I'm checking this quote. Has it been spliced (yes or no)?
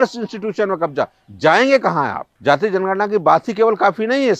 yes